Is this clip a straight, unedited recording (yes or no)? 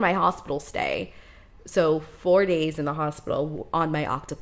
yes